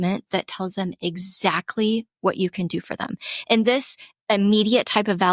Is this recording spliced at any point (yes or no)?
no